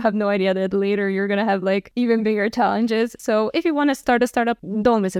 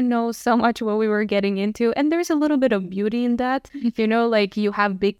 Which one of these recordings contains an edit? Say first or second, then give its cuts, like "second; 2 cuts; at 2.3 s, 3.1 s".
first; 1 cut; at 4.0 s